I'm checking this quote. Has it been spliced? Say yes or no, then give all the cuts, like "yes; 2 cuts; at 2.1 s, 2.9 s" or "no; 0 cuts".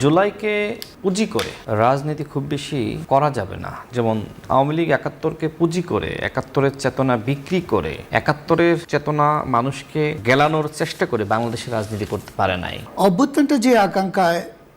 yes; 6 cuts; at 1.2 s, 3.0 s, 8.0 s, 8.8 s, 10.2 s, 12.8 s